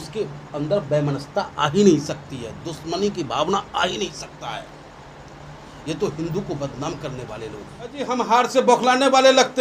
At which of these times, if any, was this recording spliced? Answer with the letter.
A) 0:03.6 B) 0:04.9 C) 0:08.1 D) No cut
C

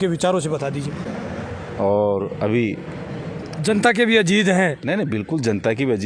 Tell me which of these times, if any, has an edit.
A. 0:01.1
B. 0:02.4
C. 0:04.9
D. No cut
A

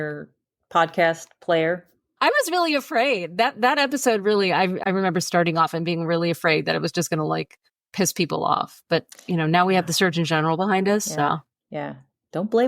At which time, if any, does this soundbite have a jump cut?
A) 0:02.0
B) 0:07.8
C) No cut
A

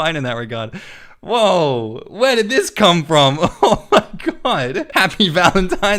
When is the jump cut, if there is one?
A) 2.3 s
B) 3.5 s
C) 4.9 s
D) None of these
C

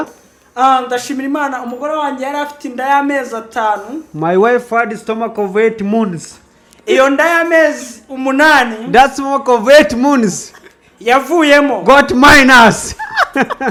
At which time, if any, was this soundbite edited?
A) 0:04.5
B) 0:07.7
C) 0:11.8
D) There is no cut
D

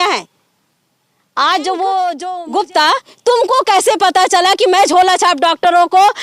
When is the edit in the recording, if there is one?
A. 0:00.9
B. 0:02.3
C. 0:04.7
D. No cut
B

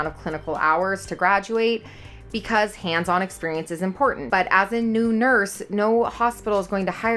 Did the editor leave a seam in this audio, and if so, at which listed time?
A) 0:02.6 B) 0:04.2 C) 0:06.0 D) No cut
B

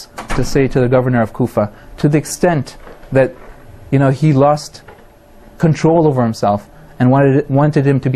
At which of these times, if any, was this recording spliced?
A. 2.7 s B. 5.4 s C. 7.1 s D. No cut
D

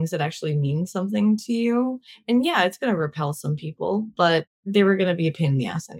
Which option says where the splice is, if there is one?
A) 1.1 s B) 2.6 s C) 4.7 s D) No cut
C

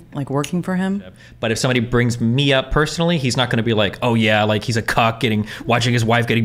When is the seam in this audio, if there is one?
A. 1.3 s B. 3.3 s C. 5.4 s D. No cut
A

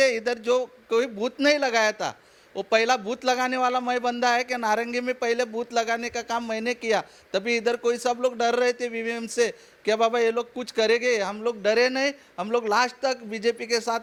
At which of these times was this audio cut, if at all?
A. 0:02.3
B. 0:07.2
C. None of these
C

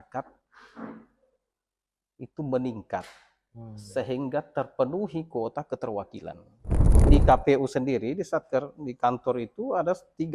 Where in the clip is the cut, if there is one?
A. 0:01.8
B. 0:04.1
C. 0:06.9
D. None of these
C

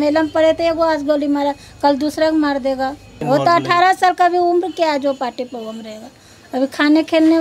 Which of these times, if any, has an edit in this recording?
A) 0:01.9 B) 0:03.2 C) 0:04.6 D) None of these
B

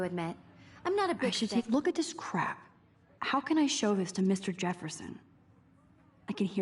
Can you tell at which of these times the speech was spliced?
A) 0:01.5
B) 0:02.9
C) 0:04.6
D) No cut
A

